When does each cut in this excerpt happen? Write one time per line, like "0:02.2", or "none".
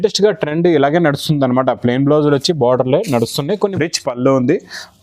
0:03.5